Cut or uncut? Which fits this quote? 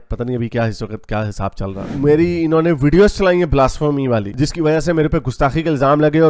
cut